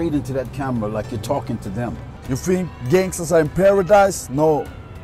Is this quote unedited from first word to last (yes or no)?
no